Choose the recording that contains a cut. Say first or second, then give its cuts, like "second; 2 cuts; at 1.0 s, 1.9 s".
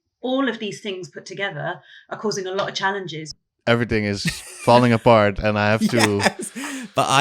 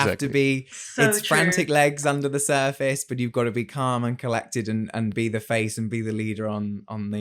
first; 1 cut; at 3.4 s